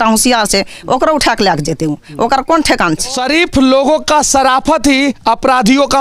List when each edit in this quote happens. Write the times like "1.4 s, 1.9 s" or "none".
3.2 s